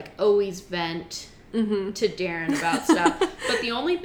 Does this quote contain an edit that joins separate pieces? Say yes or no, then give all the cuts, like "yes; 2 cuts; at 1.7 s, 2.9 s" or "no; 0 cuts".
no; 0 cuts